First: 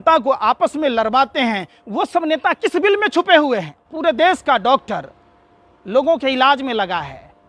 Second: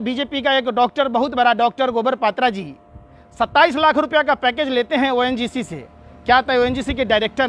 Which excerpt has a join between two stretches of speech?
first; 1 cut; at 3.8 s

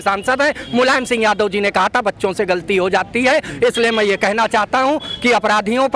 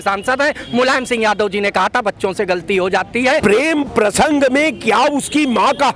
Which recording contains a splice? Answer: second; 1 cut; at 3.4 s

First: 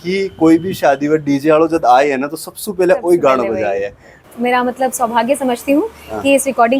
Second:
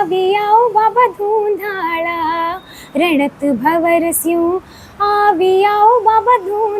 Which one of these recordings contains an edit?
first; 1 cut; at 4.3 s

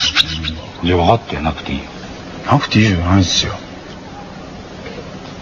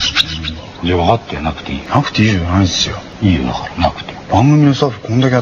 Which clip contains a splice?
second; 2 cuts; at 1.7 s, 3.0 s

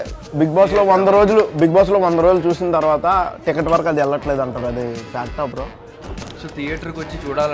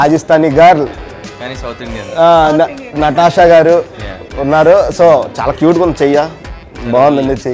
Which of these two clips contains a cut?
first; 1 cut; at 6.0 s

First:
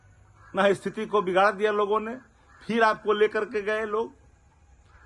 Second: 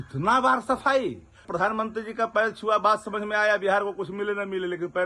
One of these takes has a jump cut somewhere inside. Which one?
second; 1 cut; at 1.4 s

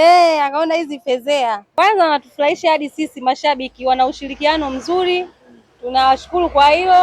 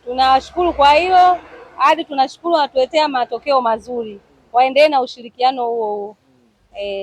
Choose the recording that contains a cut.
first; 1 cut; at 1.6 s

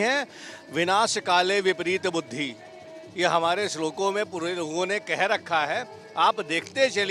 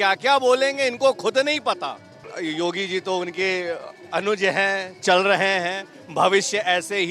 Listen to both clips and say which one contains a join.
second; 1 cut; at 2.3 s

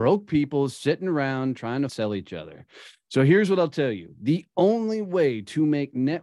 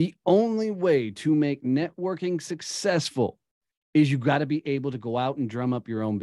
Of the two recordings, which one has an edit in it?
first; 1 cut; at 1.9 s

